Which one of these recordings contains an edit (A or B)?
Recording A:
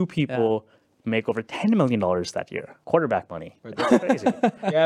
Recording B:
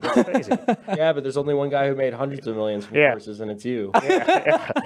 A